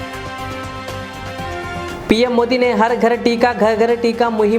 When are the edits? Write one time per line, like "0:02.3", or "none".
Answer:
0:01.6